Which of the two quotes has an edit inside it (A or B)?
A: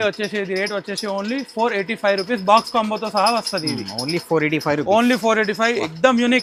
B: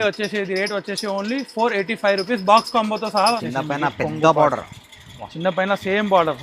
B